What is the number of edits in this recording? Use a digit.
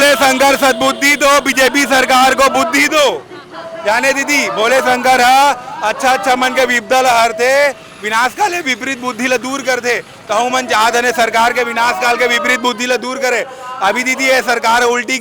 0